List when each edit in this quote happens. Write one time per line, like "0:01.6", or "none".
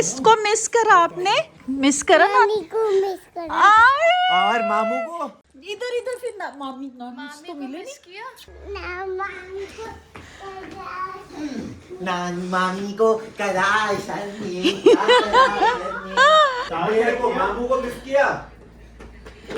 0:01.6
0:05.5
0:08.5
0:16.7